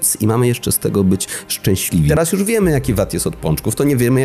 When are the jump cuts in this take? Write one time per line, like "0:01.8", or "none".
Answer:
0:02.1